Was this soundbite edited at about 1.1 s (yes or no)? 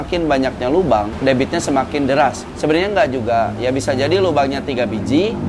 yes